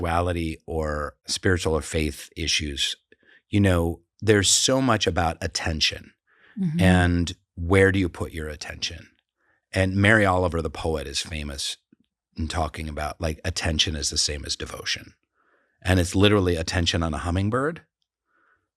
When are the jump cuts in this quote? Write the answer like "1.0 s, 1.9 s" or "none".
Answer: 1.3 s